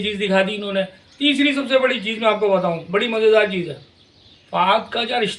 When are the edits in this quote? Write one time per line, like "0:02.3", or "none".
none